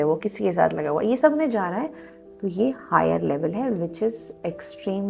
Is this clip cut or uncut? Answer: uncut